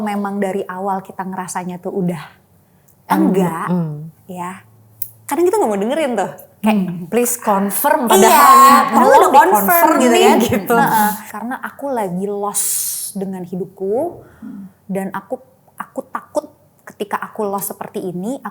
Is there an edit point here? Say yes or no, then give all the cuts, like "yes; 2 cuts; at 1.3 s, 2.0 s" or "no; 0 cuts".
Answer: yes; 1 cut; at 11.3 s